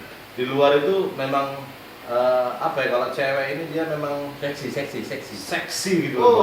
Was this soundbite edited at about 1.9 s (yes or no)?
yes